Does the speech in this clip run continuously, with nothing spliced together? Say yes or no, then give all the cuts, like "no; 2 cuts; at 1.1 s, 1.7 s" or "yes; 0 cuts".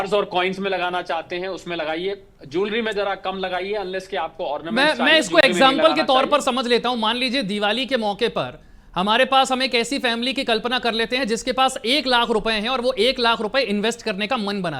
yes; 0 cuts